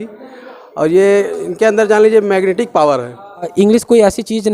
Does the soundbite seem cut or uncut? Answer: cut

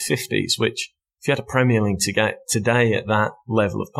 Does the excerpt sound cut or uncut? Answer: uncut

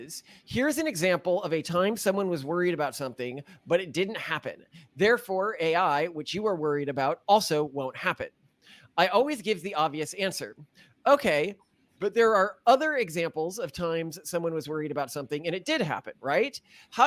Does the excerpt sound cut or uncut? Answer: uncut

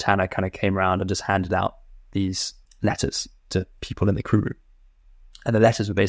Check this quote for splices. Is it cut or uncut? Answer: cut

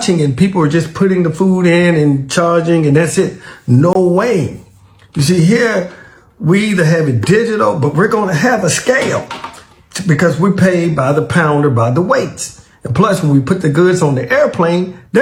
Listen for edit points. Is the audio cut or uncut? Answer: uncut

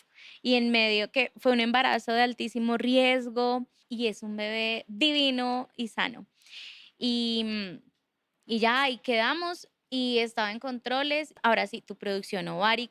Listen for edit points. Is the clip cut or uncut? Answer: cut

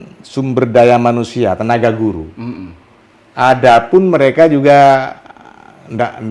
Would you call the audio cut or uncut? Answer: uncut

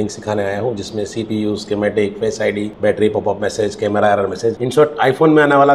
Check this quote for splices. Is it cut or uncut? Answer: cut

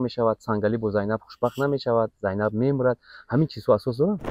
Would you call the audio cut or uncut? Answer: uncut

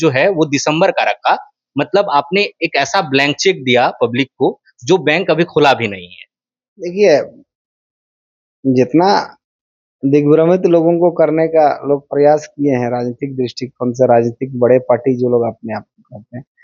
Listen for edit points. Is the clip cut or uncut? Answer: uncut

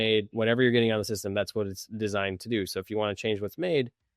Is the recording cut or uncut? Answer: uncut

